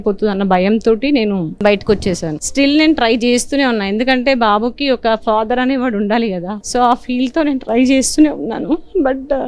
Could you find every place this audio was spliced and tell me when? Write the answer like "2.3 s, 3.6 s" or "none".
1.5 s, 2.4 s, 6.5 s